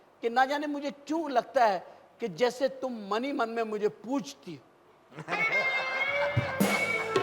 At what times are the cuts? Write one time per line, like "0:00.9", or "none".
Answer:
none